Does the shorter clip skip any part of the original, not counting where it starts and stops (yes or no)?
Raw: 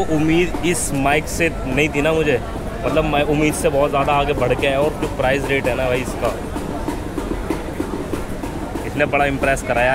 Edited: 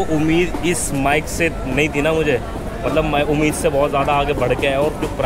no